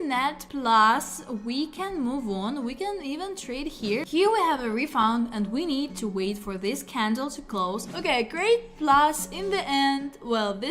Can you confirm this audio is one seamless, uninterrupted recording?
no; 2 cuts; at 4.0 s, 7.9 s

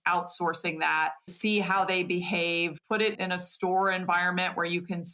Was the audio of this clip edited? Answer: yes; 2 cuts; at 1.3 s, 3.0 s

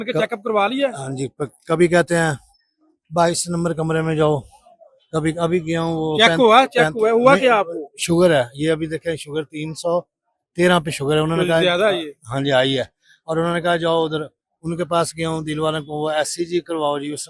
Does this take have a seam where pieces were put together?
no; 0 cuts

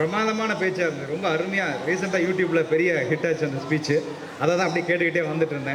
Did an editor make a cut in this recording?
no; 0 cuts

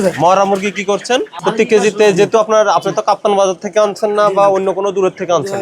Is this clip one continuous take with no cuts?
no; 1 cut; at 1.3 s

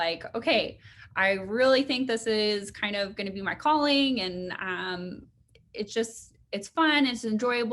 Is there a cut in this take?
no; 0 cuts

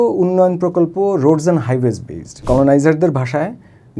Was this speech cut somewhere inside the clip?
yes; 1 cut; at 2.4 s

